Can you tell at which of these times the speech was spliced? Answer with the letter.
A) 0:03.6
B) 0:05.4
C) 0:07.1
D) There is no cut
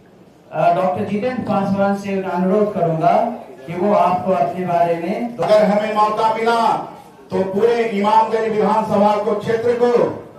B